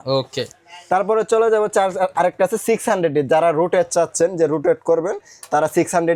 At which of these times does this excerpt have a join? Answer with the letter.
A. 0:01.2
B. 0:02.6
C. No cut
C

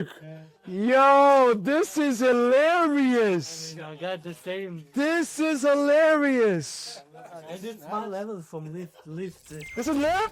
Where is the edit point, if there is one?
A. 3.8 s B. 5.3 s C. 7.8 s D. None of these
D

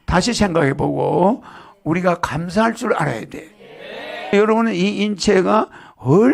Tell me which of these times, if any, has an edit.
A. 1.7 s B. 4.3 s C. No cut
B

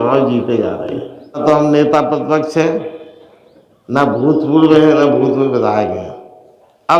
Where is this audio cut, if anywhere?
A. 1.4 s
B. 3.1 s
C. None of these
A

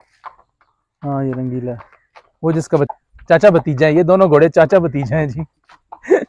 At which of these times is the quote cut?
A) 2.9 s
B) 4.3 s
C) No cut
A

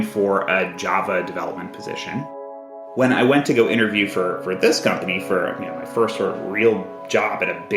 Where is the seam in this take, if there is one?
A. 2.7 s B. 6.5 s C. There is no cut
A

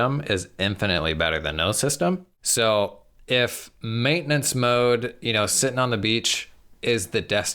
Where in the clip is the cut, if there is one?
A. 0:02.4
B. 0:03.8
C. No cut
A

